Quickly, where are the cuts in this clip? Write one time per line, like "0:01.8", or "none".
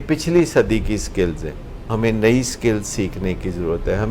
0:01.9